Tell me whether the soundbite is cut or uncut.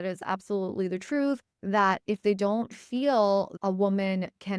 cut